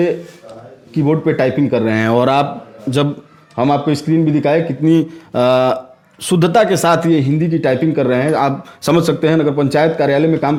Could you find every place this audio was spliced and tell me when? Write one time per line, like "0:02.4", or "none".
none